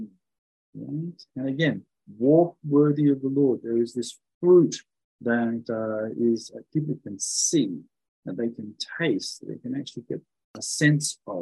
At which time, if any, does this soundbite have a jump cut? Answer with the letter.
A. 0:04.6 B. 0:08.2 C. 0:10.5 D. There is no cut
C